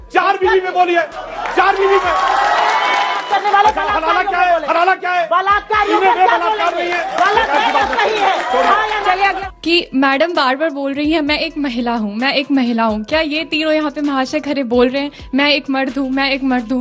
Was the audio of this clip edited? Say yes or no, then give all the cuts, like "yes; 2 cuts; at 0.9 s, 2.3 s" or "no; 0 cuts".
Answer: yes; 2 cuts; at 3.2 s, 9.4 s